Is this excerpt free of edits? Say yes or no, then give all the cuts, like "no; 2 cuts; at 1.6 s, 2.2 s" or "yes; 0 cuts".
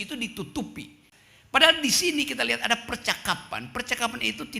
no; 1 cut; at 1.1 s